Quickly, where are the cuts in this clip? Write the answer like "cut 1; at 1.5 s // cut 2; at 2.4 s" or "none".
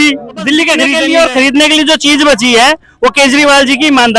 cut 1; at 0.9 s